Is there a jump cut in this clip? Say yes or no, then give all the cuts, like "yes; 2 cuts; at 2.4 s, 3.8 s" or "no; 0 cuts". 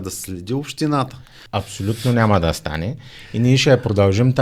yes; 1 cut; at 1.4 s